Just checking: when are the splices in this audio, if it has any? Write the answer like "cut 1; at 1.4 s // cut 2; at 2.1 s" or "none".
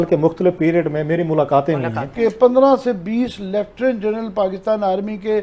cut 1; at 2.1 s